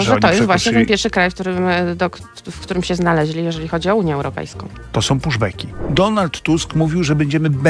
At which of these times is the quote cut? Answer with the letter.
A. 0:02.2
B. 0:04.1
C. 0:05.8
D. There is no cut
C